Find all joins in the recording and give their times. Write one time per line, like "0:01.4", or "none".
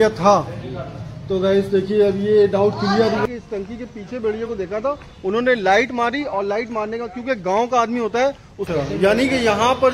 0:03.2
0:08.6